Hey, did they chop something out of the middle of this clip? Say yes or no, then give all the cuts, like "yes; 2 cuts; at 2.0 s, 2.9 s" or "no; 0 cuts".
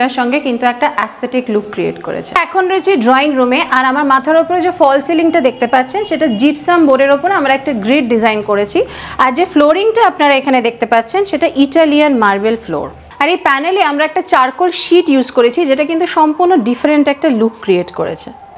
no; 0 cuts